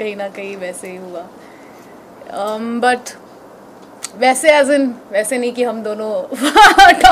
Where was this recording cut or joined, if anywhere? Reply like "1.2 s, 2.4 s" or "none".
none